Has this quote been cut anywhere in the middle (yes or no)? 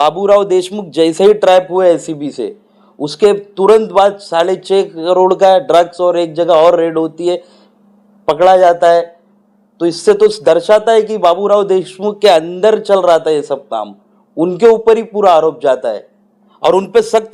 no